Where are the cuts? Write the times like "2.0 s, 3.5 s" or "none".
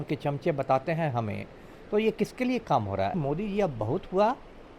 3.1 s